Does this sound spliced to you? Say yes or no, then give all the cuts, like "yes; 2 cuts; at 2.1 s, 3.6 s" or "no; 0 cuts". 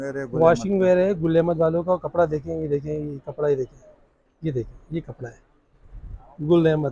no; 0 cuts